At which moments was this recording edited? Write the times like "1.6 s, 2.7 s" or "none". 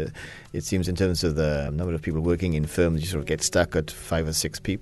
1.7 s, 3.3 s, 4.0 s